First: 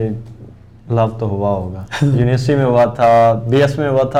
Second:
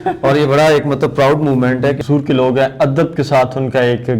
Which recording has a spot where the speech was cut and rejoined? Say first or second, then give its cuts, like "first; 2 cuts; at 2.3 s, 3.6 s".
second; 1 cut; at 2.0 s